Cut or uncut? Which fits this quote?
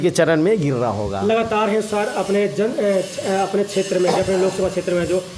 uncut